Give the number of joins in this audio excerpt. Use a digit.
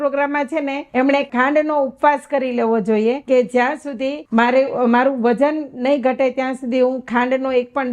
3